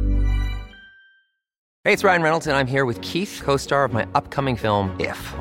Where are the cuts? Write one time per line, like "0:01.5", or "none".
0:01.6